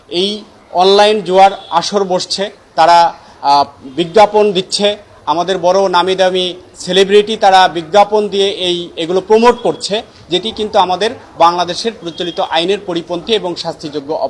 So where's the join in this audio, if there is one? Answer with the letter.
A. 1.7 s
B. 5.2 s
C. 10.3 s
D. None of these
D